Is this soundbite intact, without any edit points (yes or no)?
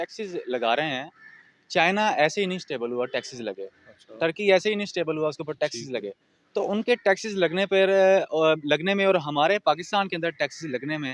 yes